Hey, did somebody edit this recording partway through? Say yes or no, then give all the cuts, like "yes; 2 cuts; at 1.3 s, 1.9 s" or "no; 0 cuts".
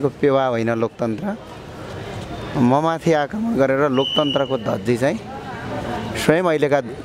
no; 0 cuts